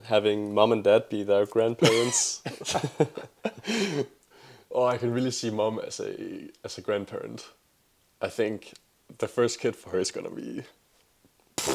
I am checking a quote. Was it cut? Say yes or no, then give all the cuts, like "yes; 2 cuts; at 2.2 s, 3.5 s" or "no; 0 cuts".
no; 0 cuts